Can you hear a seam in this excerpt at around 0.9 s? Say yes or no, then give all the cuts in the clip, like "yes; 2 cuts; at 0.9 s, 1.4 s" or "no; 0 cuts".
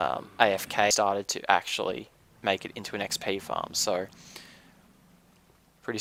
no; 0 cuts